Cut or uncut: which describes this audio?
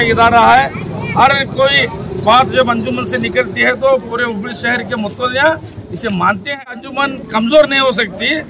cut